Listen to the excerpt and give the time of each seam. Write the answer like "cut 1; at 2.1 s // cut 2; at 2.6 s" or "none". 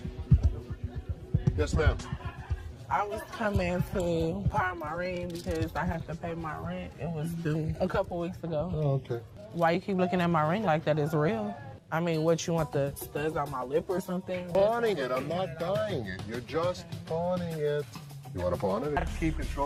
none